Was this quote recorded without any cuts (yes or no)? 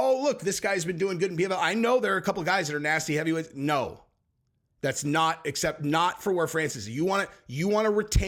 yes